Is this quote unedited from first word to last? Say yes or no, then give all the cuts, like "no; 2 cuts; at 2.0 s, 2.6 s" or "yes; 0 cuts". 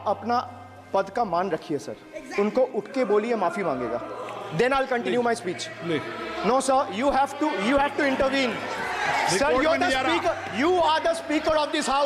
yes; 0 cuts